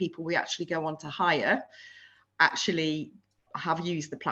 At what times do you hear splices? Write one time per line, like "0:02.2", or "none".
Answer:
none